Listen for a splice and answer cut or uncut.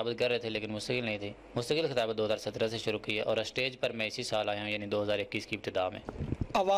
uncut